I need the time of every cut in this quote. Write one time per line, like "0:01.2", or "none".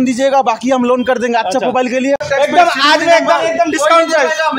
0:02.2